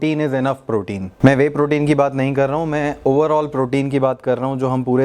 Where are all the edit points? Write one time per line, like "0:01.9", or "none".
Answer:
0:01.0